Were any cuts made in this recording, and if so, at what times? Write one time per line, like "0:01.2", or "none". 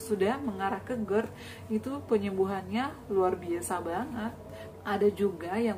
0:04.6